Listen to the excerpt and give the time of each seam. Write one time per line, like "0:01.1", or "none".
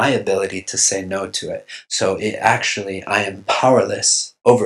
0:01.8